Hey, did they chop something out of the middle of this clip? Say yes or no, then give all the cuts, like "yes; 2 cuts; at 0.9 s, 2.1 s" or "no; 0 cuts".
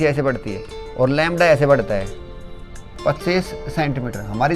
yes; 1 cut; at 2.9 s